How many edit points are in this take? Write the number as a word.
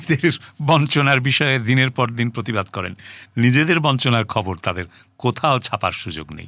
zero